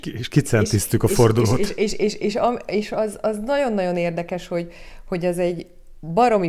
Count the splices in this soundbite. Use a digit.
0